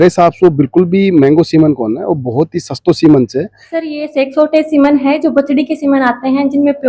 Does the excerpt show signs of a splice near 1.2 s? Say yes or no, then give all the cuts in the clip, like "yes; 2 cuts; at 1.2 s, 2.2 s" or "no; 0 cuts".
no; 1 cut; at 3.8 s